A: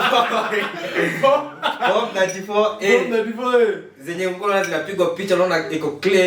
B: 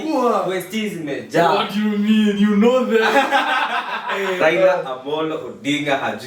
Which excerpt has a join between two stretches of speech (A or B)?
B